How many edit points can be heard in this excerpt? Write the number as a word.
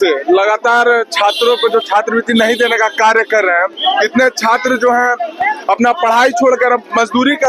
zero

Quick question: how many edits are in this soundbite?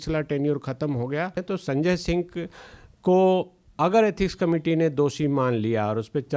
one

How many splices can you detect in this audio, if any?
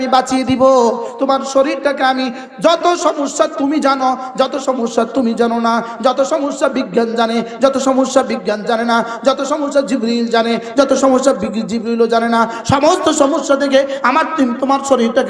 zero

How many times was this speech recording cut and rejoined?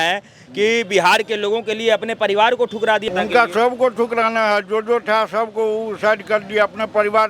one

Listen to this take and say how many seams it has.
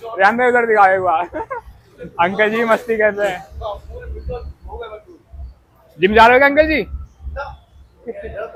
zero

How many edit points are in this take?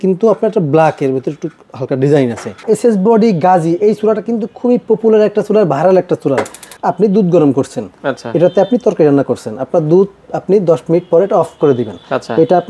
two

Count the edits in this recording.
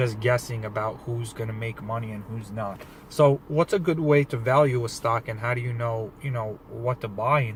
zero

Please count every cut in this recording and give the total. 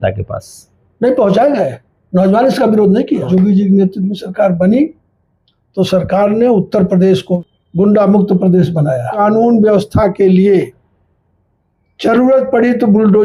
three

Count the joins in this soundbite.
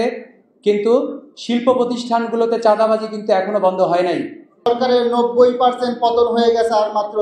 one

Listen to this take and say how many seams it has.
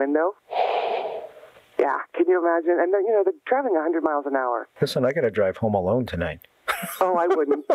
zero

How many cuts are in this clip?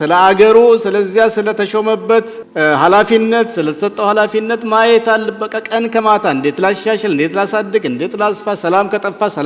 zero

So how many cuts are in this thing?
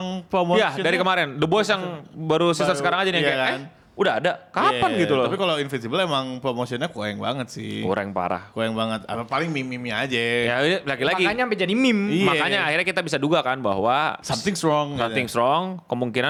zero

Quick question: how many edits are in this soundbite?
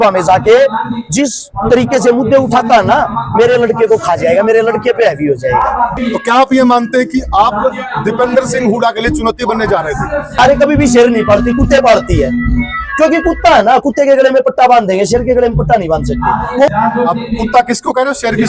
three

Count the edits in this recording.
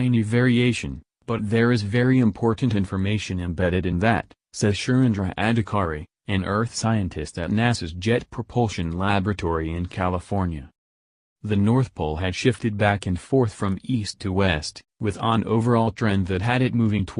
zero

